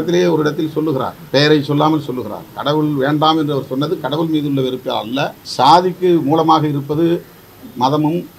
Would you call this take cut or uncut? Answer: cut